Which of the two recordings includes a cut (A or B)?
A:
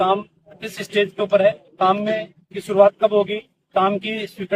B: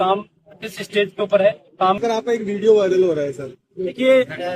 B